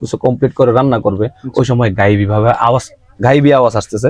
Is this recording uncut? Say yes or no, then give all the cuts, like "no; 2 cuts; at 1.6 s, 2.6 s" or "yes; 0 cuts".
yes; 0 cuts